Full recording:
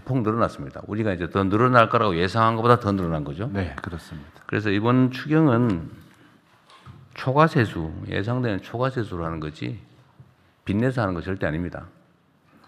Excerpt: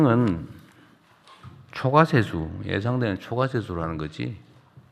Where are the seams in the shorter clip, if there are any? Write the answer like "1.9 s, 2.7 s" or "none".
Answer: none